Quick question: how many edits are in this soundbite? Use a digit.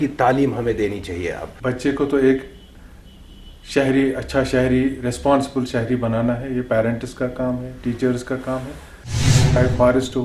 2